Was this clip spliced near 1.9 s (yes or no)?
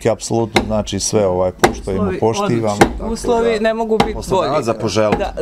no